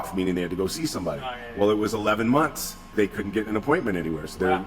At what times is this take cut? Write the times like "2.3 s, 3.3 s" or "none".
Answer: 2.9 s